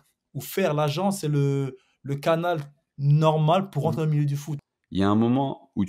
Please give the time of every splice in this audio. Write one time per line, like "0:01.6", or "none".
0:04.5